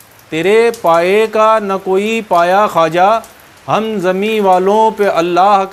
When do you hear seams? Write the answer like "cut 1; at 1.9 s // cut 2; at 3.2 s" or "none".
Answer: none